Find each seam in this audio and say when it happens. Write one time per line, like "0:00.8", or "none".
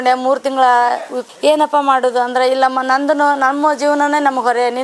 0:01.1